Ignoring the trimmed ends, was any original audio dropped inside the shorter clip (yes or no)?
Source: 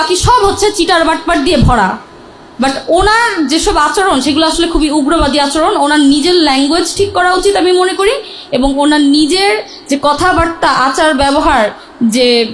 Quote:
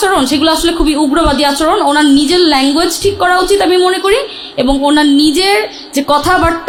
no